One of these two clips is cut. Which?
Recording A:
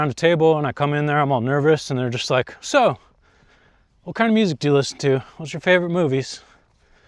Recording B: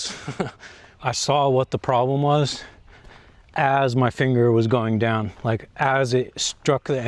B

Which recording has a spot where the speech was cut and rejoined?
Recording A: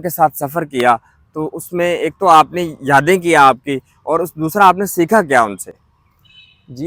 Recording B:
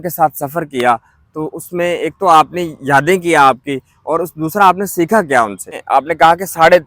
B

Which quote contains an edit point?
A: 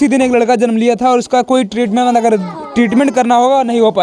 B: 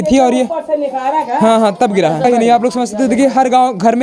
B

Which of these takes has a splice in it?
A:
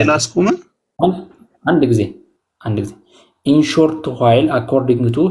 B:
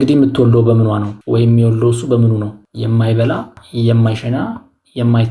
B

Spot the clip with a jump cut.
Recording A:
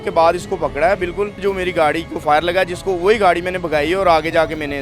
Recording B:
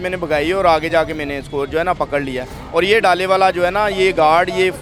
A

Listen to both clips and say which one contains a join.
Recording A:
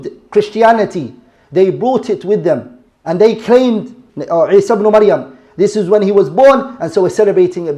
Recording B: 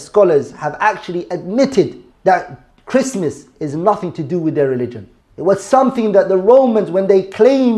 A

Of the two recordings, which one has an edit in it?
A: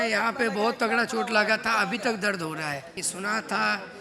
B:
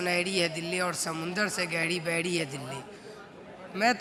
A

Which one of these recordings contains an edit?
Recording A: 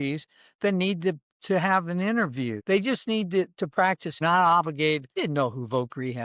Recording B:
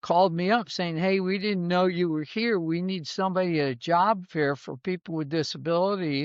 A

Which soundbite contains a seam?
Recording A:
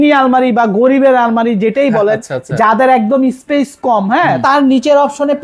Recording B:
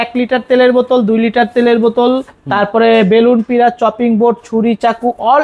A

